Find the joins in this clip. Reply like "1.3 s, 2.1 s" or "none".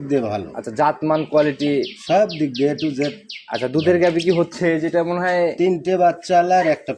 none